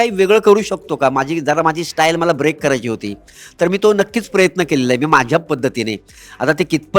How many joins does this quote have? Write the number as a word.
zero